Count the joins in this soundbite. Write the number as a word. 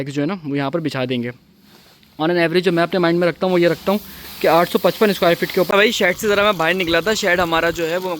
one